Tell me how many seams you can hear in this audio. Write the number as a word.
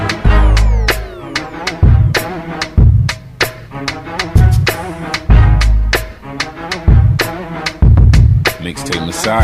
two